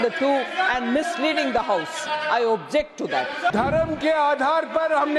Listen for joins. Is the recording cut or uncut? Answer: cut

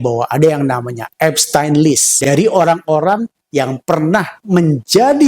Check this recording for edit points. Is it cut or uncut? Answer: cut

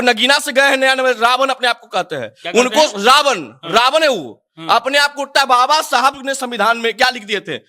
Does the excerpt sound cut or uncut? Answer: uncut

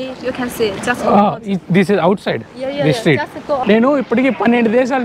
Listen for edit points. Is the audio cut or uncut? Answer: cut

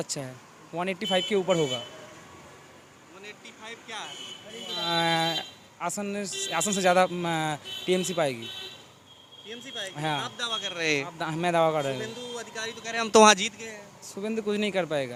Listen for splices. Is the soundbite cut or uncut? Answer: uncut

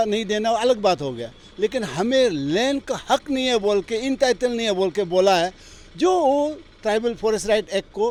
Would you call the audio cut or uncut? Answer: uncut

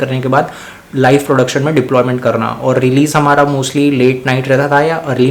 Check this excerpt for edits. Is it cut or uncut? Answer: uncut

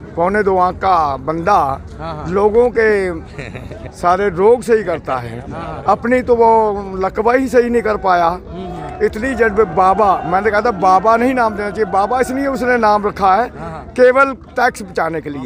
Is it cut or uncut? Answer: uncut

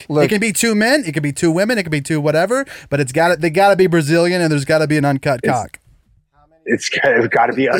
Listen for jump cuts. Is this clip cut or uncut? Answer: uncut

